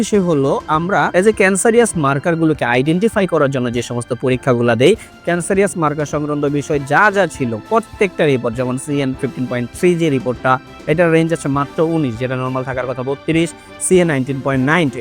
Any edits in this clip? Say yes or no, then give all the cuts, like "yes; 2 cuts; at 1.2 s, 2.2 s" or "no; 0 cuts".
yes; 1 cut; at 1.1 s